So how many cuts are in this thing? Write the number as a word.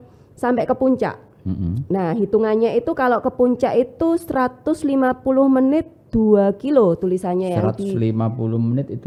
zero